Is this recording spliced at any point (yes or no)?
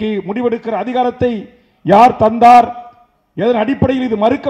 no